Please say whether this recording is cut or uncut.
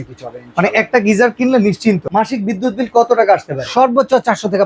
cut